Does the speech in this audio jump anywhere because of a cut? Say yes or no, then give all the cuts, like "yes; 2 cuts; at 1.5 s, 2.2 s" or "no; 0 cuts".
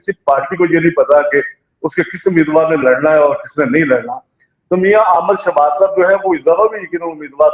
no; 0 cuts